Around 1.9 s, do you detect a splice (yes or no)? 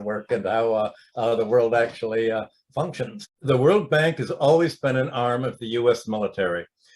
no